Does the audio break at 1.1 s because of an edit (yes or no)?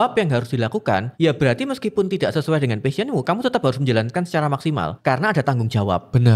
yes